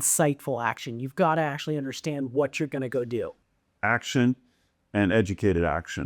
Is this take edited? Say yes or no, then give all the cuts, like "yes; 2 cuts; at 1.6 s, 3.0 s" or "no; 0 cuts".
yes; 1 cut; at 3.3 s